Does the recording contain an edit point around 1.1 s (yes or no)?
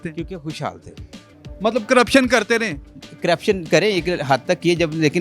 no